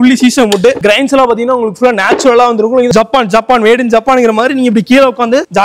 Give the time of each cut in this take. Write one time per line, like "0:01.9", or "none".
0:02.9